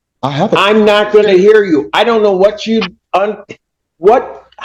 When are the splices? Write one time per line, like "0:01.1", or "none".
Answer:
none